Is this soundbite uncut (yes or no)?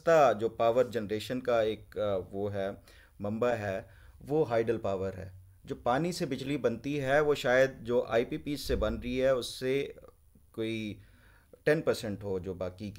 yes